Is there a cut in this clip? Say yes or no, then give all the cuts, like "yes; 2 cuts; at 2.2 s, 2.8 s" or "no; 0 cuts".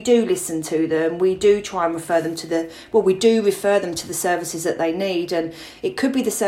no; 0 cuts